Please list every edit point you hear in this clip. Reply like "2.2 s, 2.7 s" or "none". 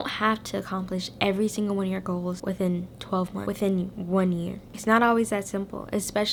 none